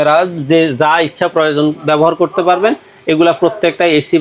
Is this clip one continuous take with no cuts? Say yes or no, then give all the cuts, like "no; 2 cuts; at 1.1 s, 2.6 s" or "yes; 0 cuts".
yes; 0 cuts